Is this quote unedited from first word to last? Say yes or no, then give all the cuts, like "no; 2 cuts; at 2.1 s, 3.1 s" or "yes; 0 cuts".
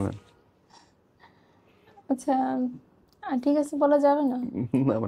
yes; 0 cuts